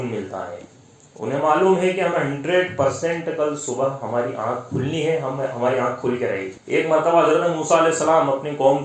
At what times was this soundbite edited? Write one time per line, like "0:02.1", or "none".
0:06.5